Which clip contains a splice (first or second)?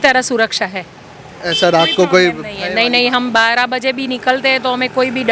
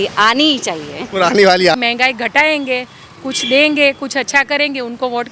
second